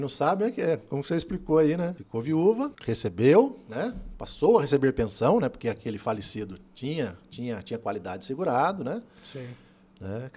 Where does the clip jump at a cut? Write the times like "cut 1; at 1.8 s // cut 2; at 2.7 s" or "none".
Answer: cut 1; at 2.0 s // cut 2; at 2.8 s

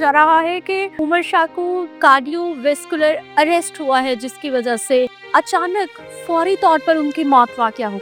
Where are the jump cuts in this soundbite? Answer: cut 1; at 1.0 s // cut 2; at 2.0 s // cut 3; at 3.2 s // cut 4; at 5.2 s

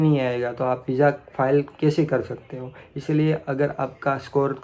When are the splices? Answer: none

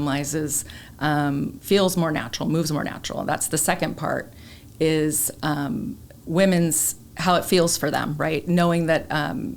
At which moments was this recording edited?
none

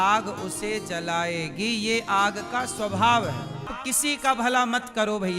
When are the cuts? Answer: cut 1; at 3.7 s

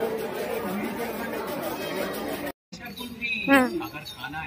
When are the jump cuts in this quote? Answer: cut 1; at 2.6 s

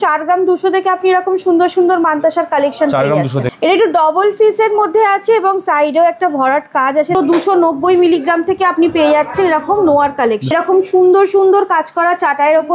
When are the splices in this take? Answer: cut 1; at 3.5 s // cut 2; at 7.1 s // cut 3; at 10.5 s

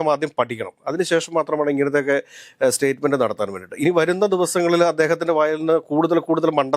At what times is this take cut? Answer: none

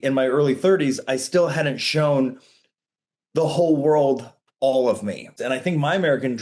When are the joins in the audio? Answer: cut 1; at 5.3 s

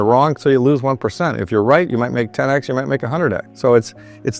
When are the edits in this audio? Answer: cut 1; at 3.5 s

